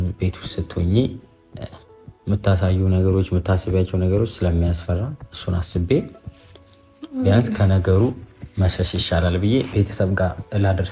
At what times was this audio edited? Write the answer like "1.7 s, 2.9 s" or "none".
9.7 s